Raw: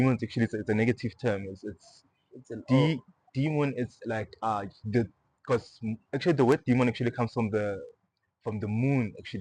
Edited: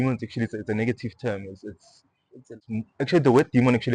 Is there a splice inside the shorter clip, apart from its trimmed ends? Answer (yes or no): yes